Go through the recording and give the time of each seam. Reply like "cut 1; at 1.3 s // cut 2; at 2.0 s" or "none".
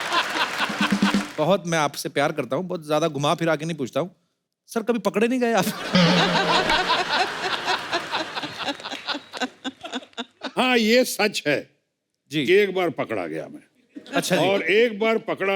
cut 1; at 1.3 s